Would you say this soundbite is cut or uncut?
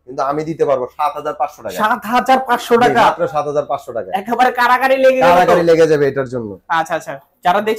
uncut